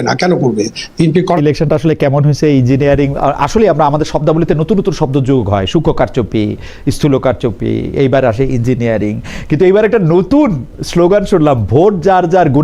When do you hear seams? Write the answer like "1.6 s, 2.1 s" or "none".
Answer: 1.4 s